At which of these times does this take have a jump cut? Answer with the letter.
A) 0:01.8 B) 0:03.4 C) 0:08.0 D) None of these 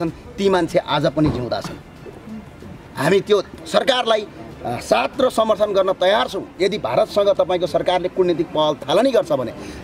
D